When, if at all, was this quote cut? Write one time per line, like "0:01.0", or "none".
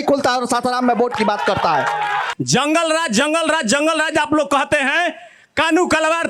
0:02.3